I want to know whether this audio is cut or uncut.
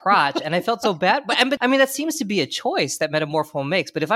cut